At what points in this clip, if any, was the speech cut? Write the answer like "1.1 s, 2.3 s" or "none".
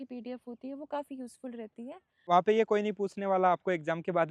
2.2 s